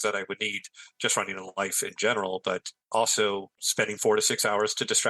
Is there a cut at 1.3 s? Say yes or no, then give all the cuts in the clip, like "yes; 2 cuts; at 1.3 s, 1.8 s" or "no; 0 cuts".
no; 2 cuts; at 2.7 s, 3.6 s